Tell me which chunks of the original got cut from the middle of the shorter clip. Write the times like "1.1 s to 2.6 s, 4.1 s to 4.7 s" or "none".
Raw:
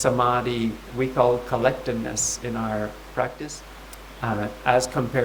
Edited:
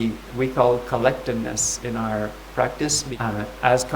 3.7 s to 4.1 s